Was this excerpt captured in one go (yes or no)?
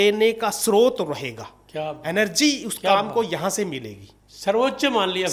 yes